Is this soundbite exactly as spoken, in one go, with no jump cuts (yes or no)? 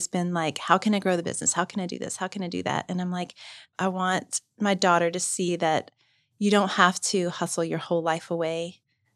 no